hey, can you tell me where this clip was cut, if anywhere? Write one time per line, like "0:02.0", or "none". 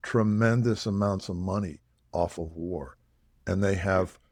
none